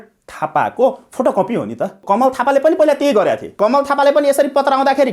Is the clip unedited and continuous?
no; 2 cuts; at 2.0 s, 3.5 s

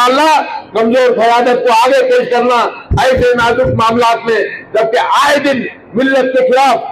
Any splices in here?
no; 0 cuts

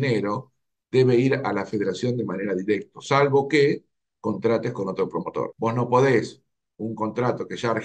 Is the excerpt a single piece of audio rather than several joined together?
no; 1 cut; at 5.5 s

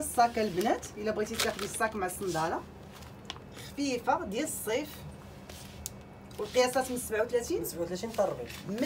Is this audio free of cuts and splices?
yes; 0 cuts

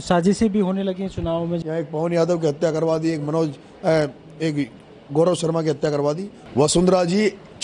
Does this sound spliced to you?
yes; 2 cuts; at 1.6 s, 6.3 s

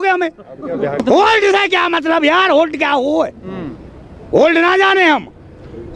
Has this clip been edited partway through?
yes; 1 cut; at 1.0 s

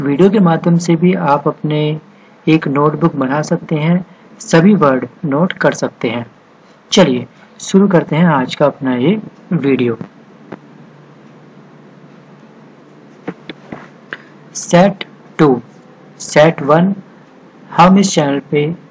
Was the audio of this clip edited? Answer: no; 0 cuts

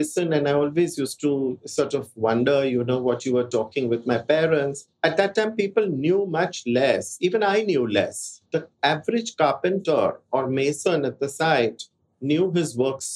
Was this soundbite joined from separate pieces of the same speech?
yes; 1 cut; at 8.3 s

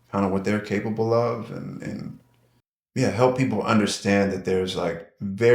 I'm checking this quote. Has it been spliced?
no; 0 cuts

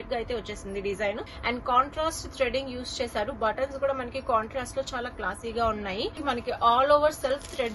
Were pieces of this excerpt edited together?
yes; 2 cuts; at 1.3 s, 6.2 s

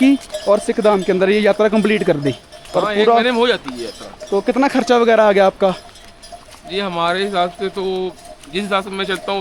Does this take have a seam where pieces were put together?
no; 0 cuts

